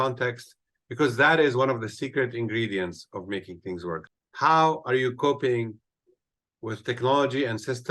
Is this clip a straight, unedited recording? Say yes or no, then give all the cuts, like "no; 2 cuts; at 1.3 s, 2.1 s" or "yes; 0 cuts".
no; 1 cut; at 4.1 s